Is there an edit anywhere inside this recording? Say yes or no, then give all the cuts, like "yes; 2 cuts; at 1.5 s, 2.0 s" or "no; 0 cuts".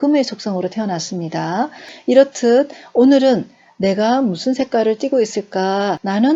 yes; 1 cut; at 1.9 s